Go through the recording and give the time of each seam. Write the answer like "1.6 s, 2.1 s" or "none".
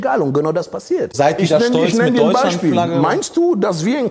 1.1 s